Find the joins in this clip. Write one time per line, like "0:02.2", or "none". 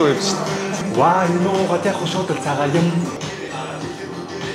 0:00.8
0:03.2